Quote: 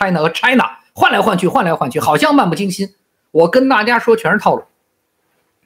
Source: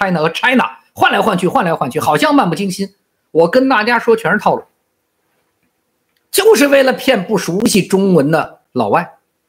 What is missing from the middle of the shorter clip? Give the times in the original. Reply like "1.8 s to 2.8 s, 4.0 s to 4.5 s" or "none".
none